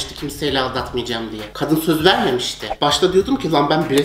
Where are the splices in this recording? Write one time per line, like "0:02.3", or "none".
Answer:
0:01.4
0:02.6